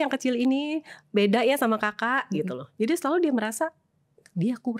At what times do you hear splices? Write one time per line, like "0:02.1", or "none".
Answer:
none